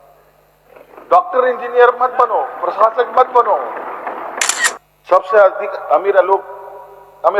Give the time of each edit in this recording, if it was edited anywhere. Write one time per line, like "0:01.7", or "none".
0:04.8